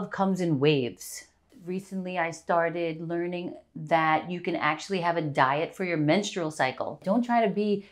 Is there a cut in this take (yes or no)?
yes